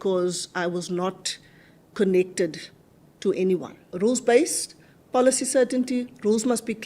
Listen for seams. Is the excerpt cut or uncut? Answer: cut